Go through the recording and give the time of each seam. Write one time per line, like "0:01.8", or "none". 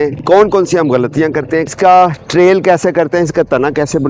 0:01.7